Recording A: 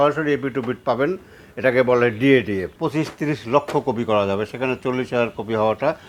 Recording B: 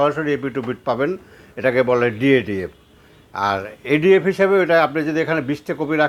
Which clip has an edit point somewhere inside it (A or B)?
A